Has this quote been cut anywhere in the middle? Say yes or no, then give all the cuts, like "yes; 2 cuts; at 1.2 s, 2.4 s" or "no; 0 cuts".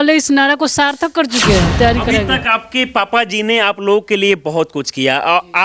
yes; 1 cut; at 1.8 s